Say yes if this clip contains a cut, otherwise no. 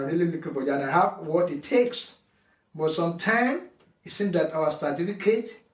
no